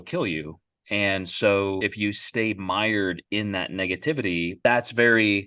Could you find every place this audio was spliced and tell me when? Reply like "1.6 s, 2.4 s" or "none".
1.9 s, 4.6 s

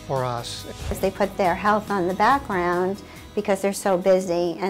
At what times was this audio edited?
1.0 s

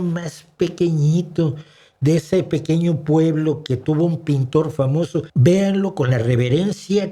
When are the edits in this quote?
5.3 s

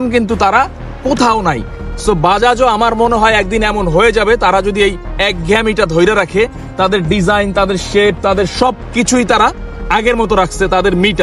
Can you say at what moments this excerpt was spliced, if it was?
none

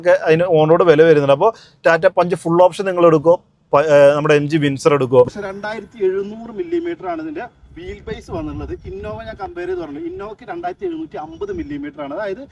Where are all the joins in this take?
5.5 s

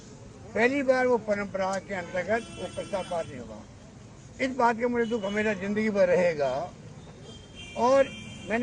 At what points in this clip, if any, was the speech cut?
none

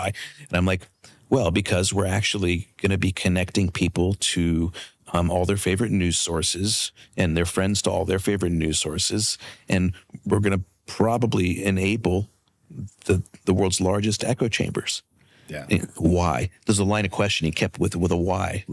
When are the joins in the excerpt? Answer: none

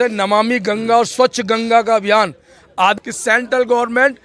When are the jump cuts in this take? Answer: 2.9 s

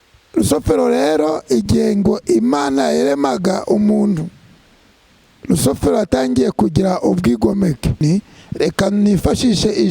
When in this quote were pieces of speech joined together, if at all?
8.0 s

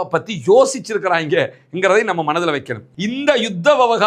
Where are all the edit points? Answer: 2.9 s

